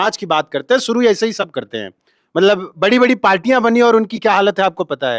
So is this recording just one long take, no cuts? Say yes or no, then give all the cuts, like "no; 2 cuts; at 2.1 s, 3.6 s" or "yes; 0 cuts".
yes; 0 cuts